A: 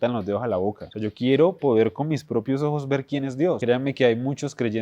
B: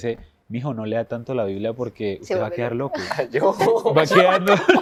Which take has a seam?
A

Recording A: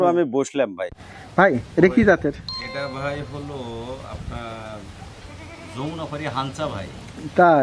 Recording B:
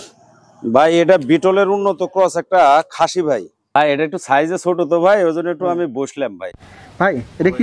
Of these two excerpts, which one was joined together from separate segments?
B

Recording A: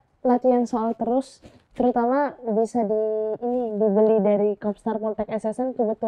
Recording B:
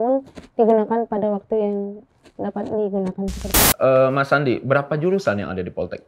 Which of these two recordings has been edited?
B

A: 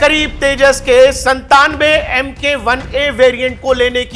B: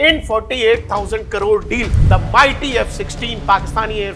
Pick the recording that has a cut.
B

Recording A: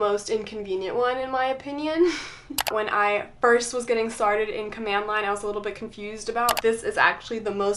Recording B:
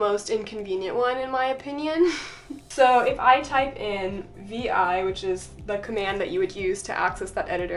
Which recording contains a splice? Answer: A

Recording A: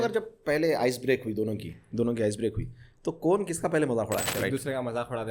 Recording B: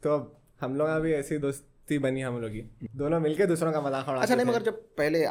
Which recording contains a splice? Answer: A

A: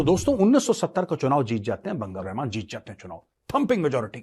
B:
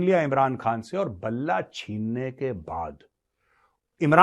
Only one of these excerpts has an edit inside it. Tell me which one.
A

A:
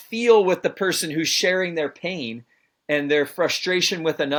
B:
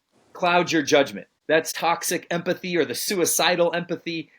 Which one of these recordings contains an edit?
B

